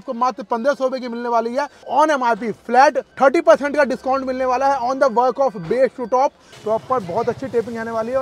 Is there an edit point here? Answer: yes; 3 cuts; at 1.9 s, 3.1 s, 6.5 s

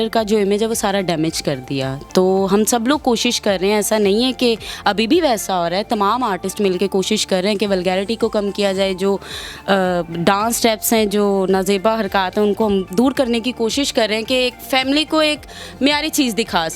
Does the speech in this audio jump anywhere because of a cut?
no; 0 cuts

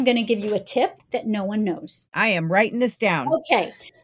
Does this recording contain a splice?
yes; 2 cuts; at 1.0 s, 2.1 s

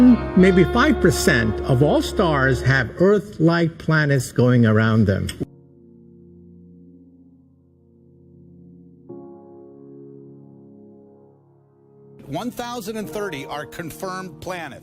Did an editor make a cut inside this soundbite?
yes; 1 cut; at 5.5 s

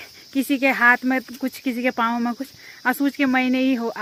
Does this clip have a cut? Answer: no; 0 cuts

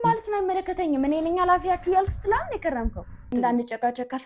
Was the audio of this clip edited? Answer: yes; 1 cut; at 3.3 s

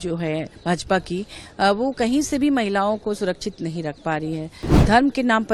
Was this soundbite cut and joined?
no; 0 cuts

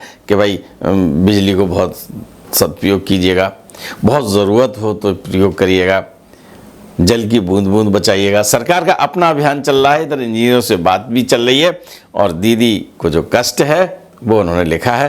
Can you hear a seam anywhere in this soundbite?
yes; 1 cut; at 2.5 s

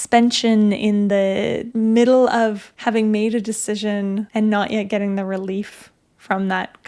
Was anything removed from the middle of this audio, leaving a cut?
yes; 3 cuts; at 1.6 s, 2.7 s, 4.3 s

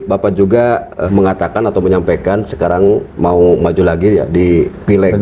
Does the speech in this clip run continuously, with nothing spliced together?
no; 1 cut; at 1.0 s

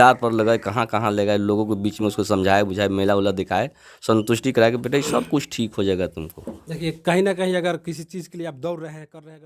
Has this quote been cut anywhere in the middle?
no; 0 cuts

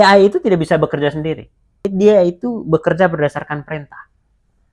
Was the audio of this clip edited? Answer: yes; 1 cut; at 1.9 s

